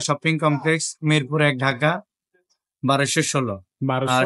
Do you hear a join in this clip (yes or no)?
no